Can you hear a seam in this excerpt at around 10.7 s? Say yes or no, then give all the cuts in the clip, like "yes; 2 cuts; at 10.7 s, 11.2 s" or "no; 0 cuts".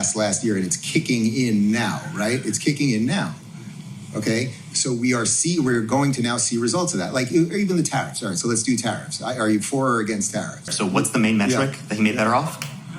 yes; 1 cut; at 10.7 s